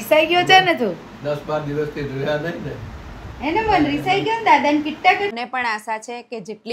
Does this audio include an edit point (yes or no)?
yes